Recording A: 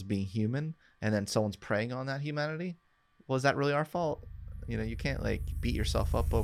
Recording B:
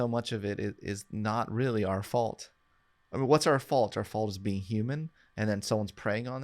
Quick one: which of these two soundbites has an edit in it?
B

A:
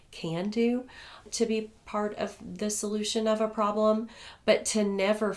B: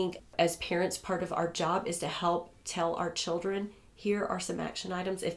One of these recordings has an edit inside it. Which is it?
A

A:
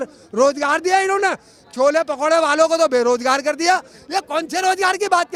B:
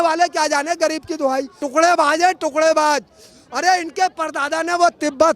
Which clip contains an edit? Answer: B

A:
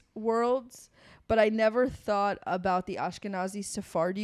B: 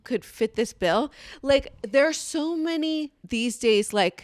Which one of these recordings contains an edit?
B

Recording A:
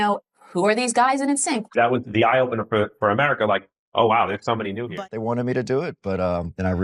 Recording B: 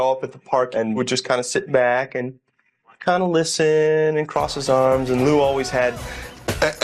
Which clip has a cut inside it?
A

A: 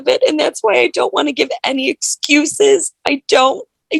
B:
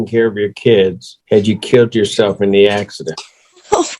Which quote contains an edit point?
B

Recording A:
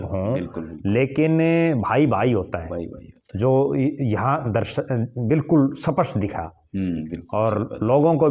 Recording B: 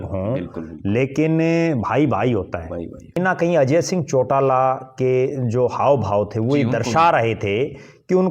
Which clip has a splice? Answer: B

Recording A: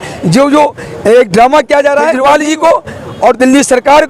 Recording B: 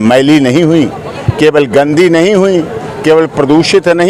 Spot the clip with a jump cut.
A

